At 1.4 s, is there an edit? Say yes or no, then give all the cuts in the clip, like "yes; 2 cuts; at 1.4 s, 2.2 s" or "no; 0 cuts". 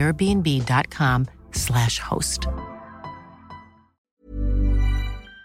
no; 1 cut; at 4.1 s